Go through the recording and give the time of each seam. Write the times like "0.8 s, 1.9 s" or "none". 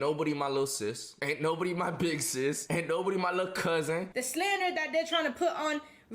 1.1 s, 2.6 s, 4.2 s